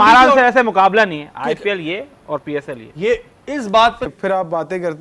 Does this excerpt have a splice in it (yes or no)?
yes